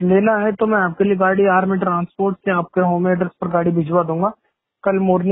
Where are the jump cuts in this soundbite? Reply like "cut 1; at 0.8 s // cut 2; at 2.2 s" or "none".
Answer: none